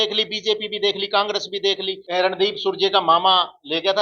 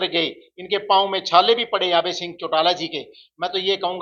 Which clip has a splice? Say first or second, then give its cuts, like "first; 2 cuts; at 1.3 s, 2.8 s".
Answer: first; 1 cut; at 1.9 s